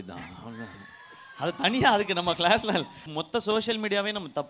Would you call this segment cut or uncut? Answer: cut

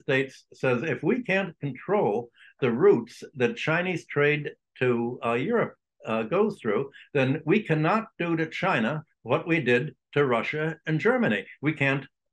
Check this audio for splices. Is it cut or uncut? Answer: uncut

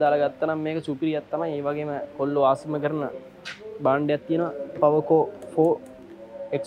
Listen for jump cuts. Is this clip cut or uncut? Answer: uncut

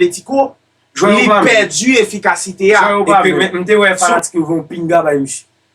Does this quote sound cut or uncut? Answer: cut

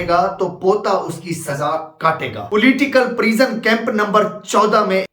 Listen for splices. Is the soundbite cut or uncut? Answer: cut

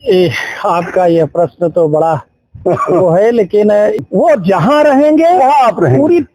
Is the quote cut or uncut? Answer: cut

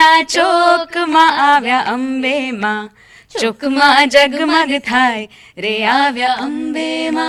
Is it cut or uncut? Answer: uncut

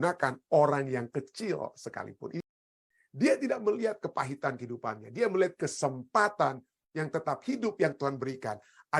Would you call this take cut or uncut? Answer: cut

